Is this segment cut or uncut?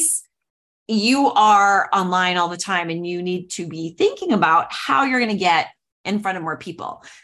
uncut